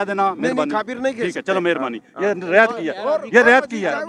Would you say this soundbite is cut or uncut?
uncut